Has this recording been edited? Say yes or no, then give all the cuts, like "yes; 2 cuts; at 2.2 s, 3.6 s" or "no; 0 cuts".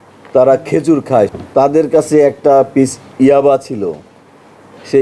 yes; 1 cut; at 1.3 s